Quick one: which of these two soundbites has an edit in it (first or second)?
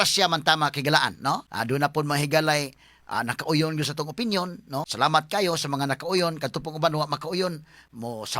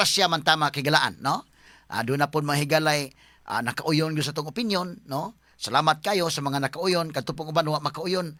first